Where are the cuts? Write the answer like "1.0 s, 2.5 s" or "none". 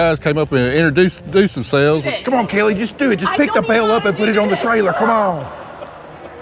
2.1 s